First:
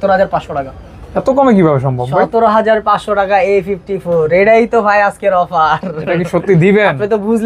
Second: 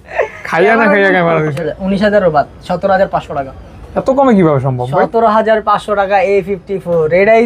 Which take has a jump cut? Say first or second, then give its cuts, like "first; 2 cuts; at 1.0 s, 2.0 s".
second; 1 cut; at 1.6 s